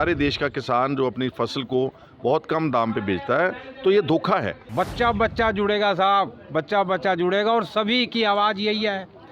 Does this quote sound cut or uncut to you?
cut